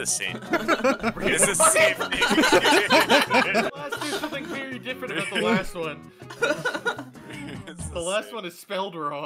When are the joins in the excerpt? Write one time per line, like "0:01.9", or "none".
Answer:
0:03.7